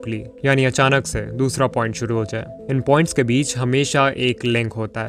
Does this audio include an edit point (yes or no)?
no